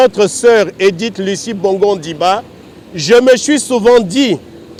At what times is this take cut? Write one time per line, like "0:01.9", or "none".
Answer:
none